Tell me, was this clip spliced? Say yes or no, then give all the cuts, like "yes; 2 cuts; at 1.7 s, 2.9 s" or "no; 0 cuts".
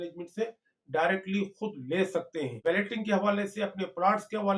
yes; 1 cut; at 2.6 s